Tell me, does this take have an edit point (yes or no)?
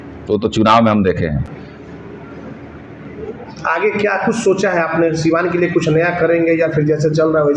no